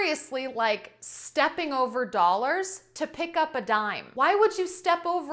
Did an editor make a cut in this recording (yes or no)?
no